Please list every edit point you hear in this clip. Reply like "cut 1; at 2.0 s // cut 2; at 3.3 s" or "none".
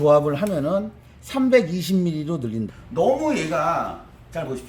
cut 1; at 2.7 s